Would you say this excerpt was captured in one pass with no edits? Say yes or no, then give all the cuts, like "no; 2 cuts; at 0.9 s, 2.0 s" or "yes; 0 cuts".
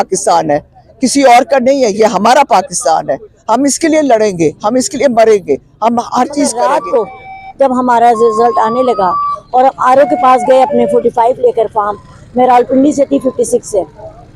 no; 1 cut; at 6.6 s